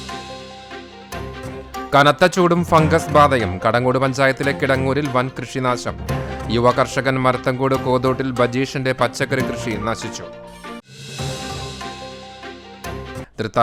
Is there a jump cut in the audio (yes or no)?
no